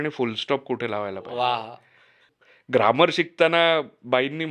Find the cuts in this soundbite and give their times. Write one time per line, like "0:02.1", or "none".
0:02.2